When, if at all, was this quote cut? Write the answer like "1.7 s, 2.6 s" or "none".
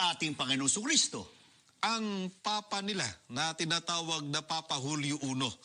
1.0 s